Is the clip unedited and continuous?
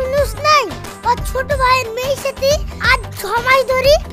yes; 0 cuts

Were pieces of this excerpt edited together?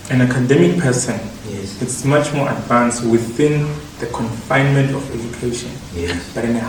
no; 0 cuts

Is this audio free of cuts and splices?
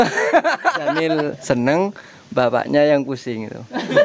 no; 1 cut; at 1.0 s

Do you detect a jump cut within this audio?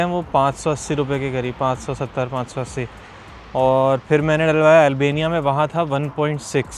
no; 0 cuts

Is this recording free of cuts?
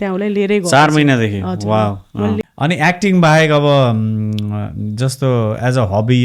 no; 1 cut; at 2.4 s

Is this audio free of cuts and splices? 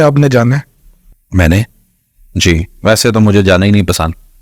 yes; 0 cuts

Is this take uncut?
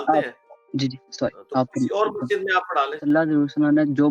no; 1 cut; at 3.0 s

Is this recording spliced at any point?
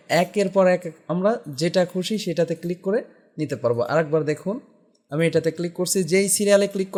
no; 0 cuts

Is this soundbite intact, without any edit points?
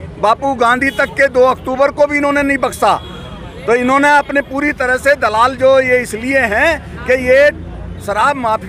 yes; 0 cuts

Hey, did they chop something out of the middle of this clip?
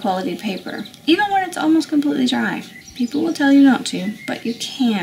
yes; 1 cut; at 0.9 s

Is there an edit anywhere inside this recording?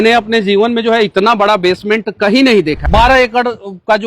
yes; 1 cut; at 2.8 s

